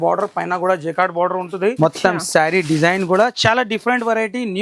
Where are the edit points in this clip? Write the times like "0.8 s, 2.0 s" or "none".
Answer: 1.8 s